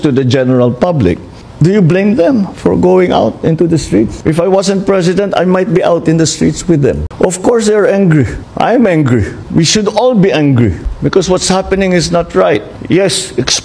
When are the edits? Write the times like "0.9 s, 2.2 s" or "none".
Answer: 7.1 s